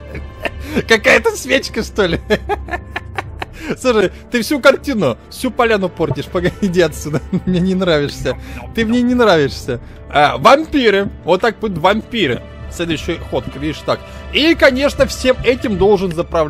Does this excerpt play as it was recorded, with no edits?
yes; 0 cuts

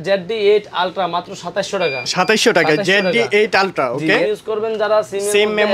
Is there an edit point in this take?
yes; 1 cut; at 4.3 s

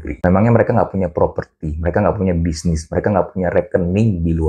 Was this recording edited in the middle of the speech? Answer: no; 0 cuts

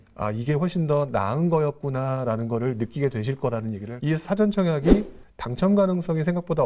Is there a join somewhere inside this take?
yes; 1 cut; at 3.8 s

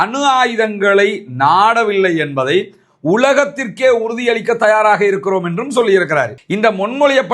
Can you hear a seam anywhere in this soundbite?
yes; 1 cut; at 6.4 s

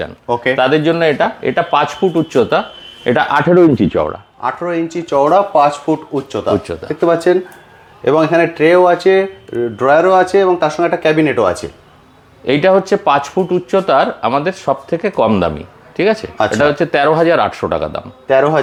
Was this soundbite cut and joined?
no; 0 cuts

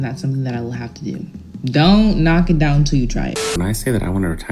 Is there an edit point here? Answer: yes; 1 cut; at 3.5 s

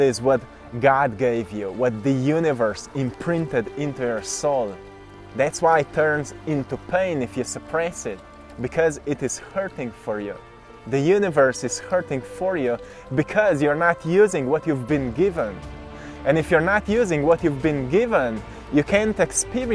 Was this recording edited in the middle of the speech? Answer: no; 0 cuts

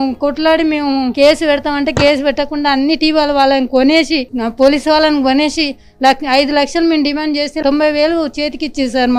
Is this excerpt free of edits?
yes; 0 cuts

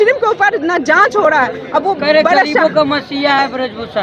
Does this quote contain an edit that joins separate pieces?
no; 0 cuts

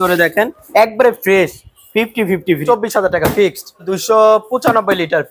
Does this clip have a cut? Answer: yes; 2 cuts; at 2.6 s, 3.9 s

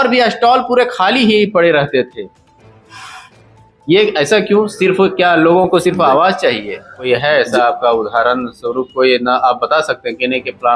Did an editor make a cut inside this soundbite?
yes; 1 cut; at 7.1 s

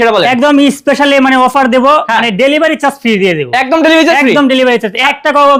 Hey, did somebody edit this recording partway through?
no; 0 cuts

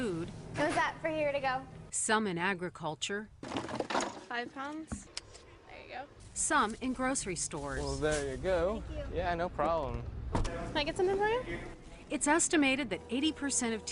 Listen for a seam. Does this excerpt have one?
yes; 1 cut; at 10.0 s

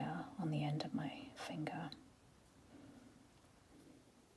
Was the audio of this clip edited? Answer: no; 0 cuts

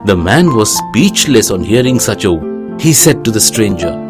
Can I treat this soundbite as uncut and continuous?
no; 1 cut; at 2.4 s

